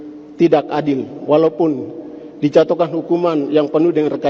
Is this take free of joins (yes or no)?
yes